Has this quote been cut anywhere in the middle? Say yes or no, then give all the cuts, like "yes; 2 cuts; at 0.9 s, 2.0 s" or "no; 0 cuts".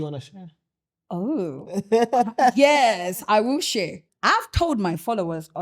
yes; 1 cut; at 4.1 s